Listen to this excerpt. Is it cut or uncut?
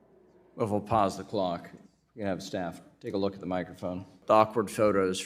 cut